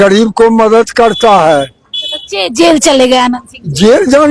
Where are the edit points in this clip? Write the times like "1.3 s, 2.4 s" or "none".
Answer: none